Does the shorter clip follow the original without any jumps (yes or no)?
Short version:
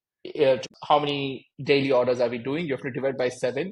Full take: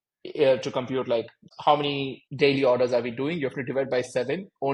no